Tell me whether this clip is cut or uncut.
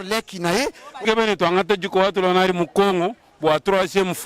cut